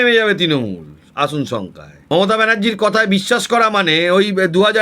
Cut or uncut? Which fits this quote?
cut